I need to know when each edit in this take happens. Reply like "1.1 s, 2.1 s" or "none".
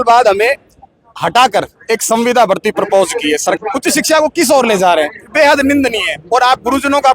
3.6 s